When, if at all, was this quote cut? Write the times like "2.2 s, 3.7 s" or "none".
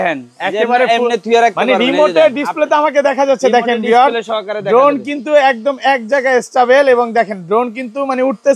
none